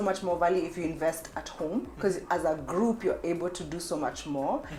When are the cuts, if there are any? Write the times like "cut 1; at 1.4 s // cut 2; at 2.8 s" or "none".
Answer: none

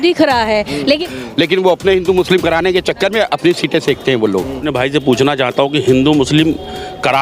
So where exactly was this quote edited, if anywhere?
cut 1; at 0.8 s // cut 2; at 4.6 s

